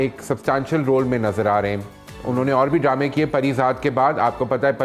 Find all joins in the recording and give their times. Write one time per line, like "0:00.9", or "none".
none